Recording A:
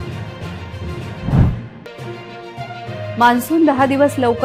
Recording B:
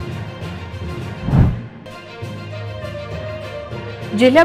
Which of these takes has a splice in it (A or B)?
A